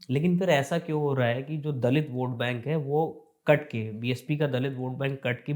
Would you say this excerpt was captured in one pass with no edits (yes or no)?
yes